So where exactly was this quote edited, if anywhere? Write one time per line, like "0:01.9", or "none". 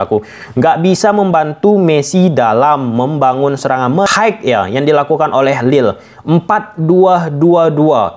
0:04.1

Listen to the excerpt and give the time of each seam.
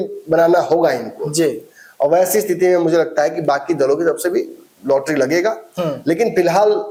none

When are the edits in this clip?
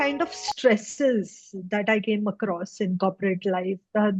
none

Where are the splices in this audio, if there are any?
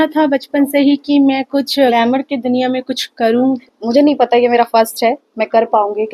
0:01.9
0:03.6

